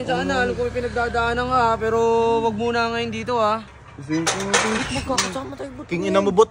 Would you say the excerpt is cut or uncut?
uncut